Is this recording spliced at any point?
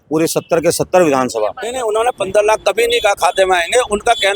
yes; 1 cut; at 1.7 s

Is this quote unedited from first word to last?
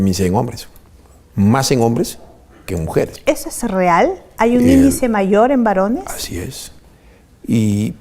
yes; 0 cuts

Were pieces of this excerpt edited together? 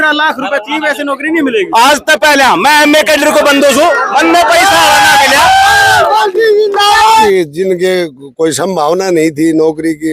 yes; 1 cut; at 7.2 s

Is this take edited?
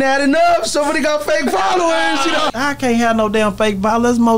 yes; 1 cut; at 2.5 s

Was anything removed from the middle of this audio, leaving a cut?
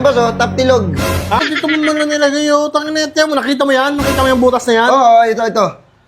yes; 1 cut; at 1.4 s

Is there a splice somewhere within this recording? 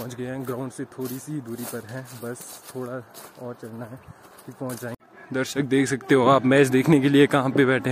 yes; 1 cut; at 4.9 s

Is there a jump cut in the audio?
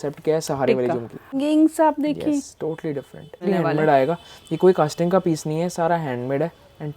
yes; 2 cuts; at 1.4 s, 3.4 s

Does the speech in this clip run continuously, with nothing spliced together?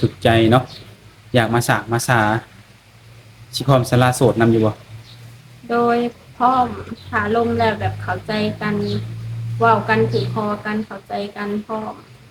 yes; 0 cuts

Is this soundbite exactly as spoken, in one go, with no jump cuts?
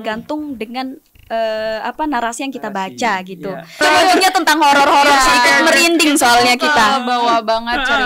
no; 1 cut; at 3.8 s

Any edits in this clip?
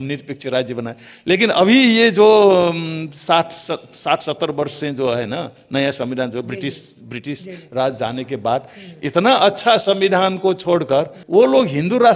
no; 0 cuts

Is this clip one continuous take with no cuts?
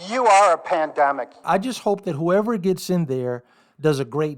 no; 1 cut; at 1.4 s

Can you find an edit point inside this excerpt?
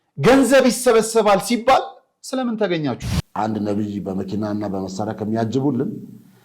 yes; 1 cut; at 3.2 s

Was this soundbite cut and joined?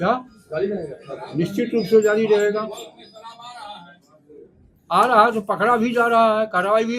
no; 0 cuts

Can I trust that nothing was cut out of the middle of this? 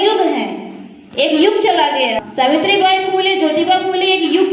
no; 1 cut; at 2.2 s

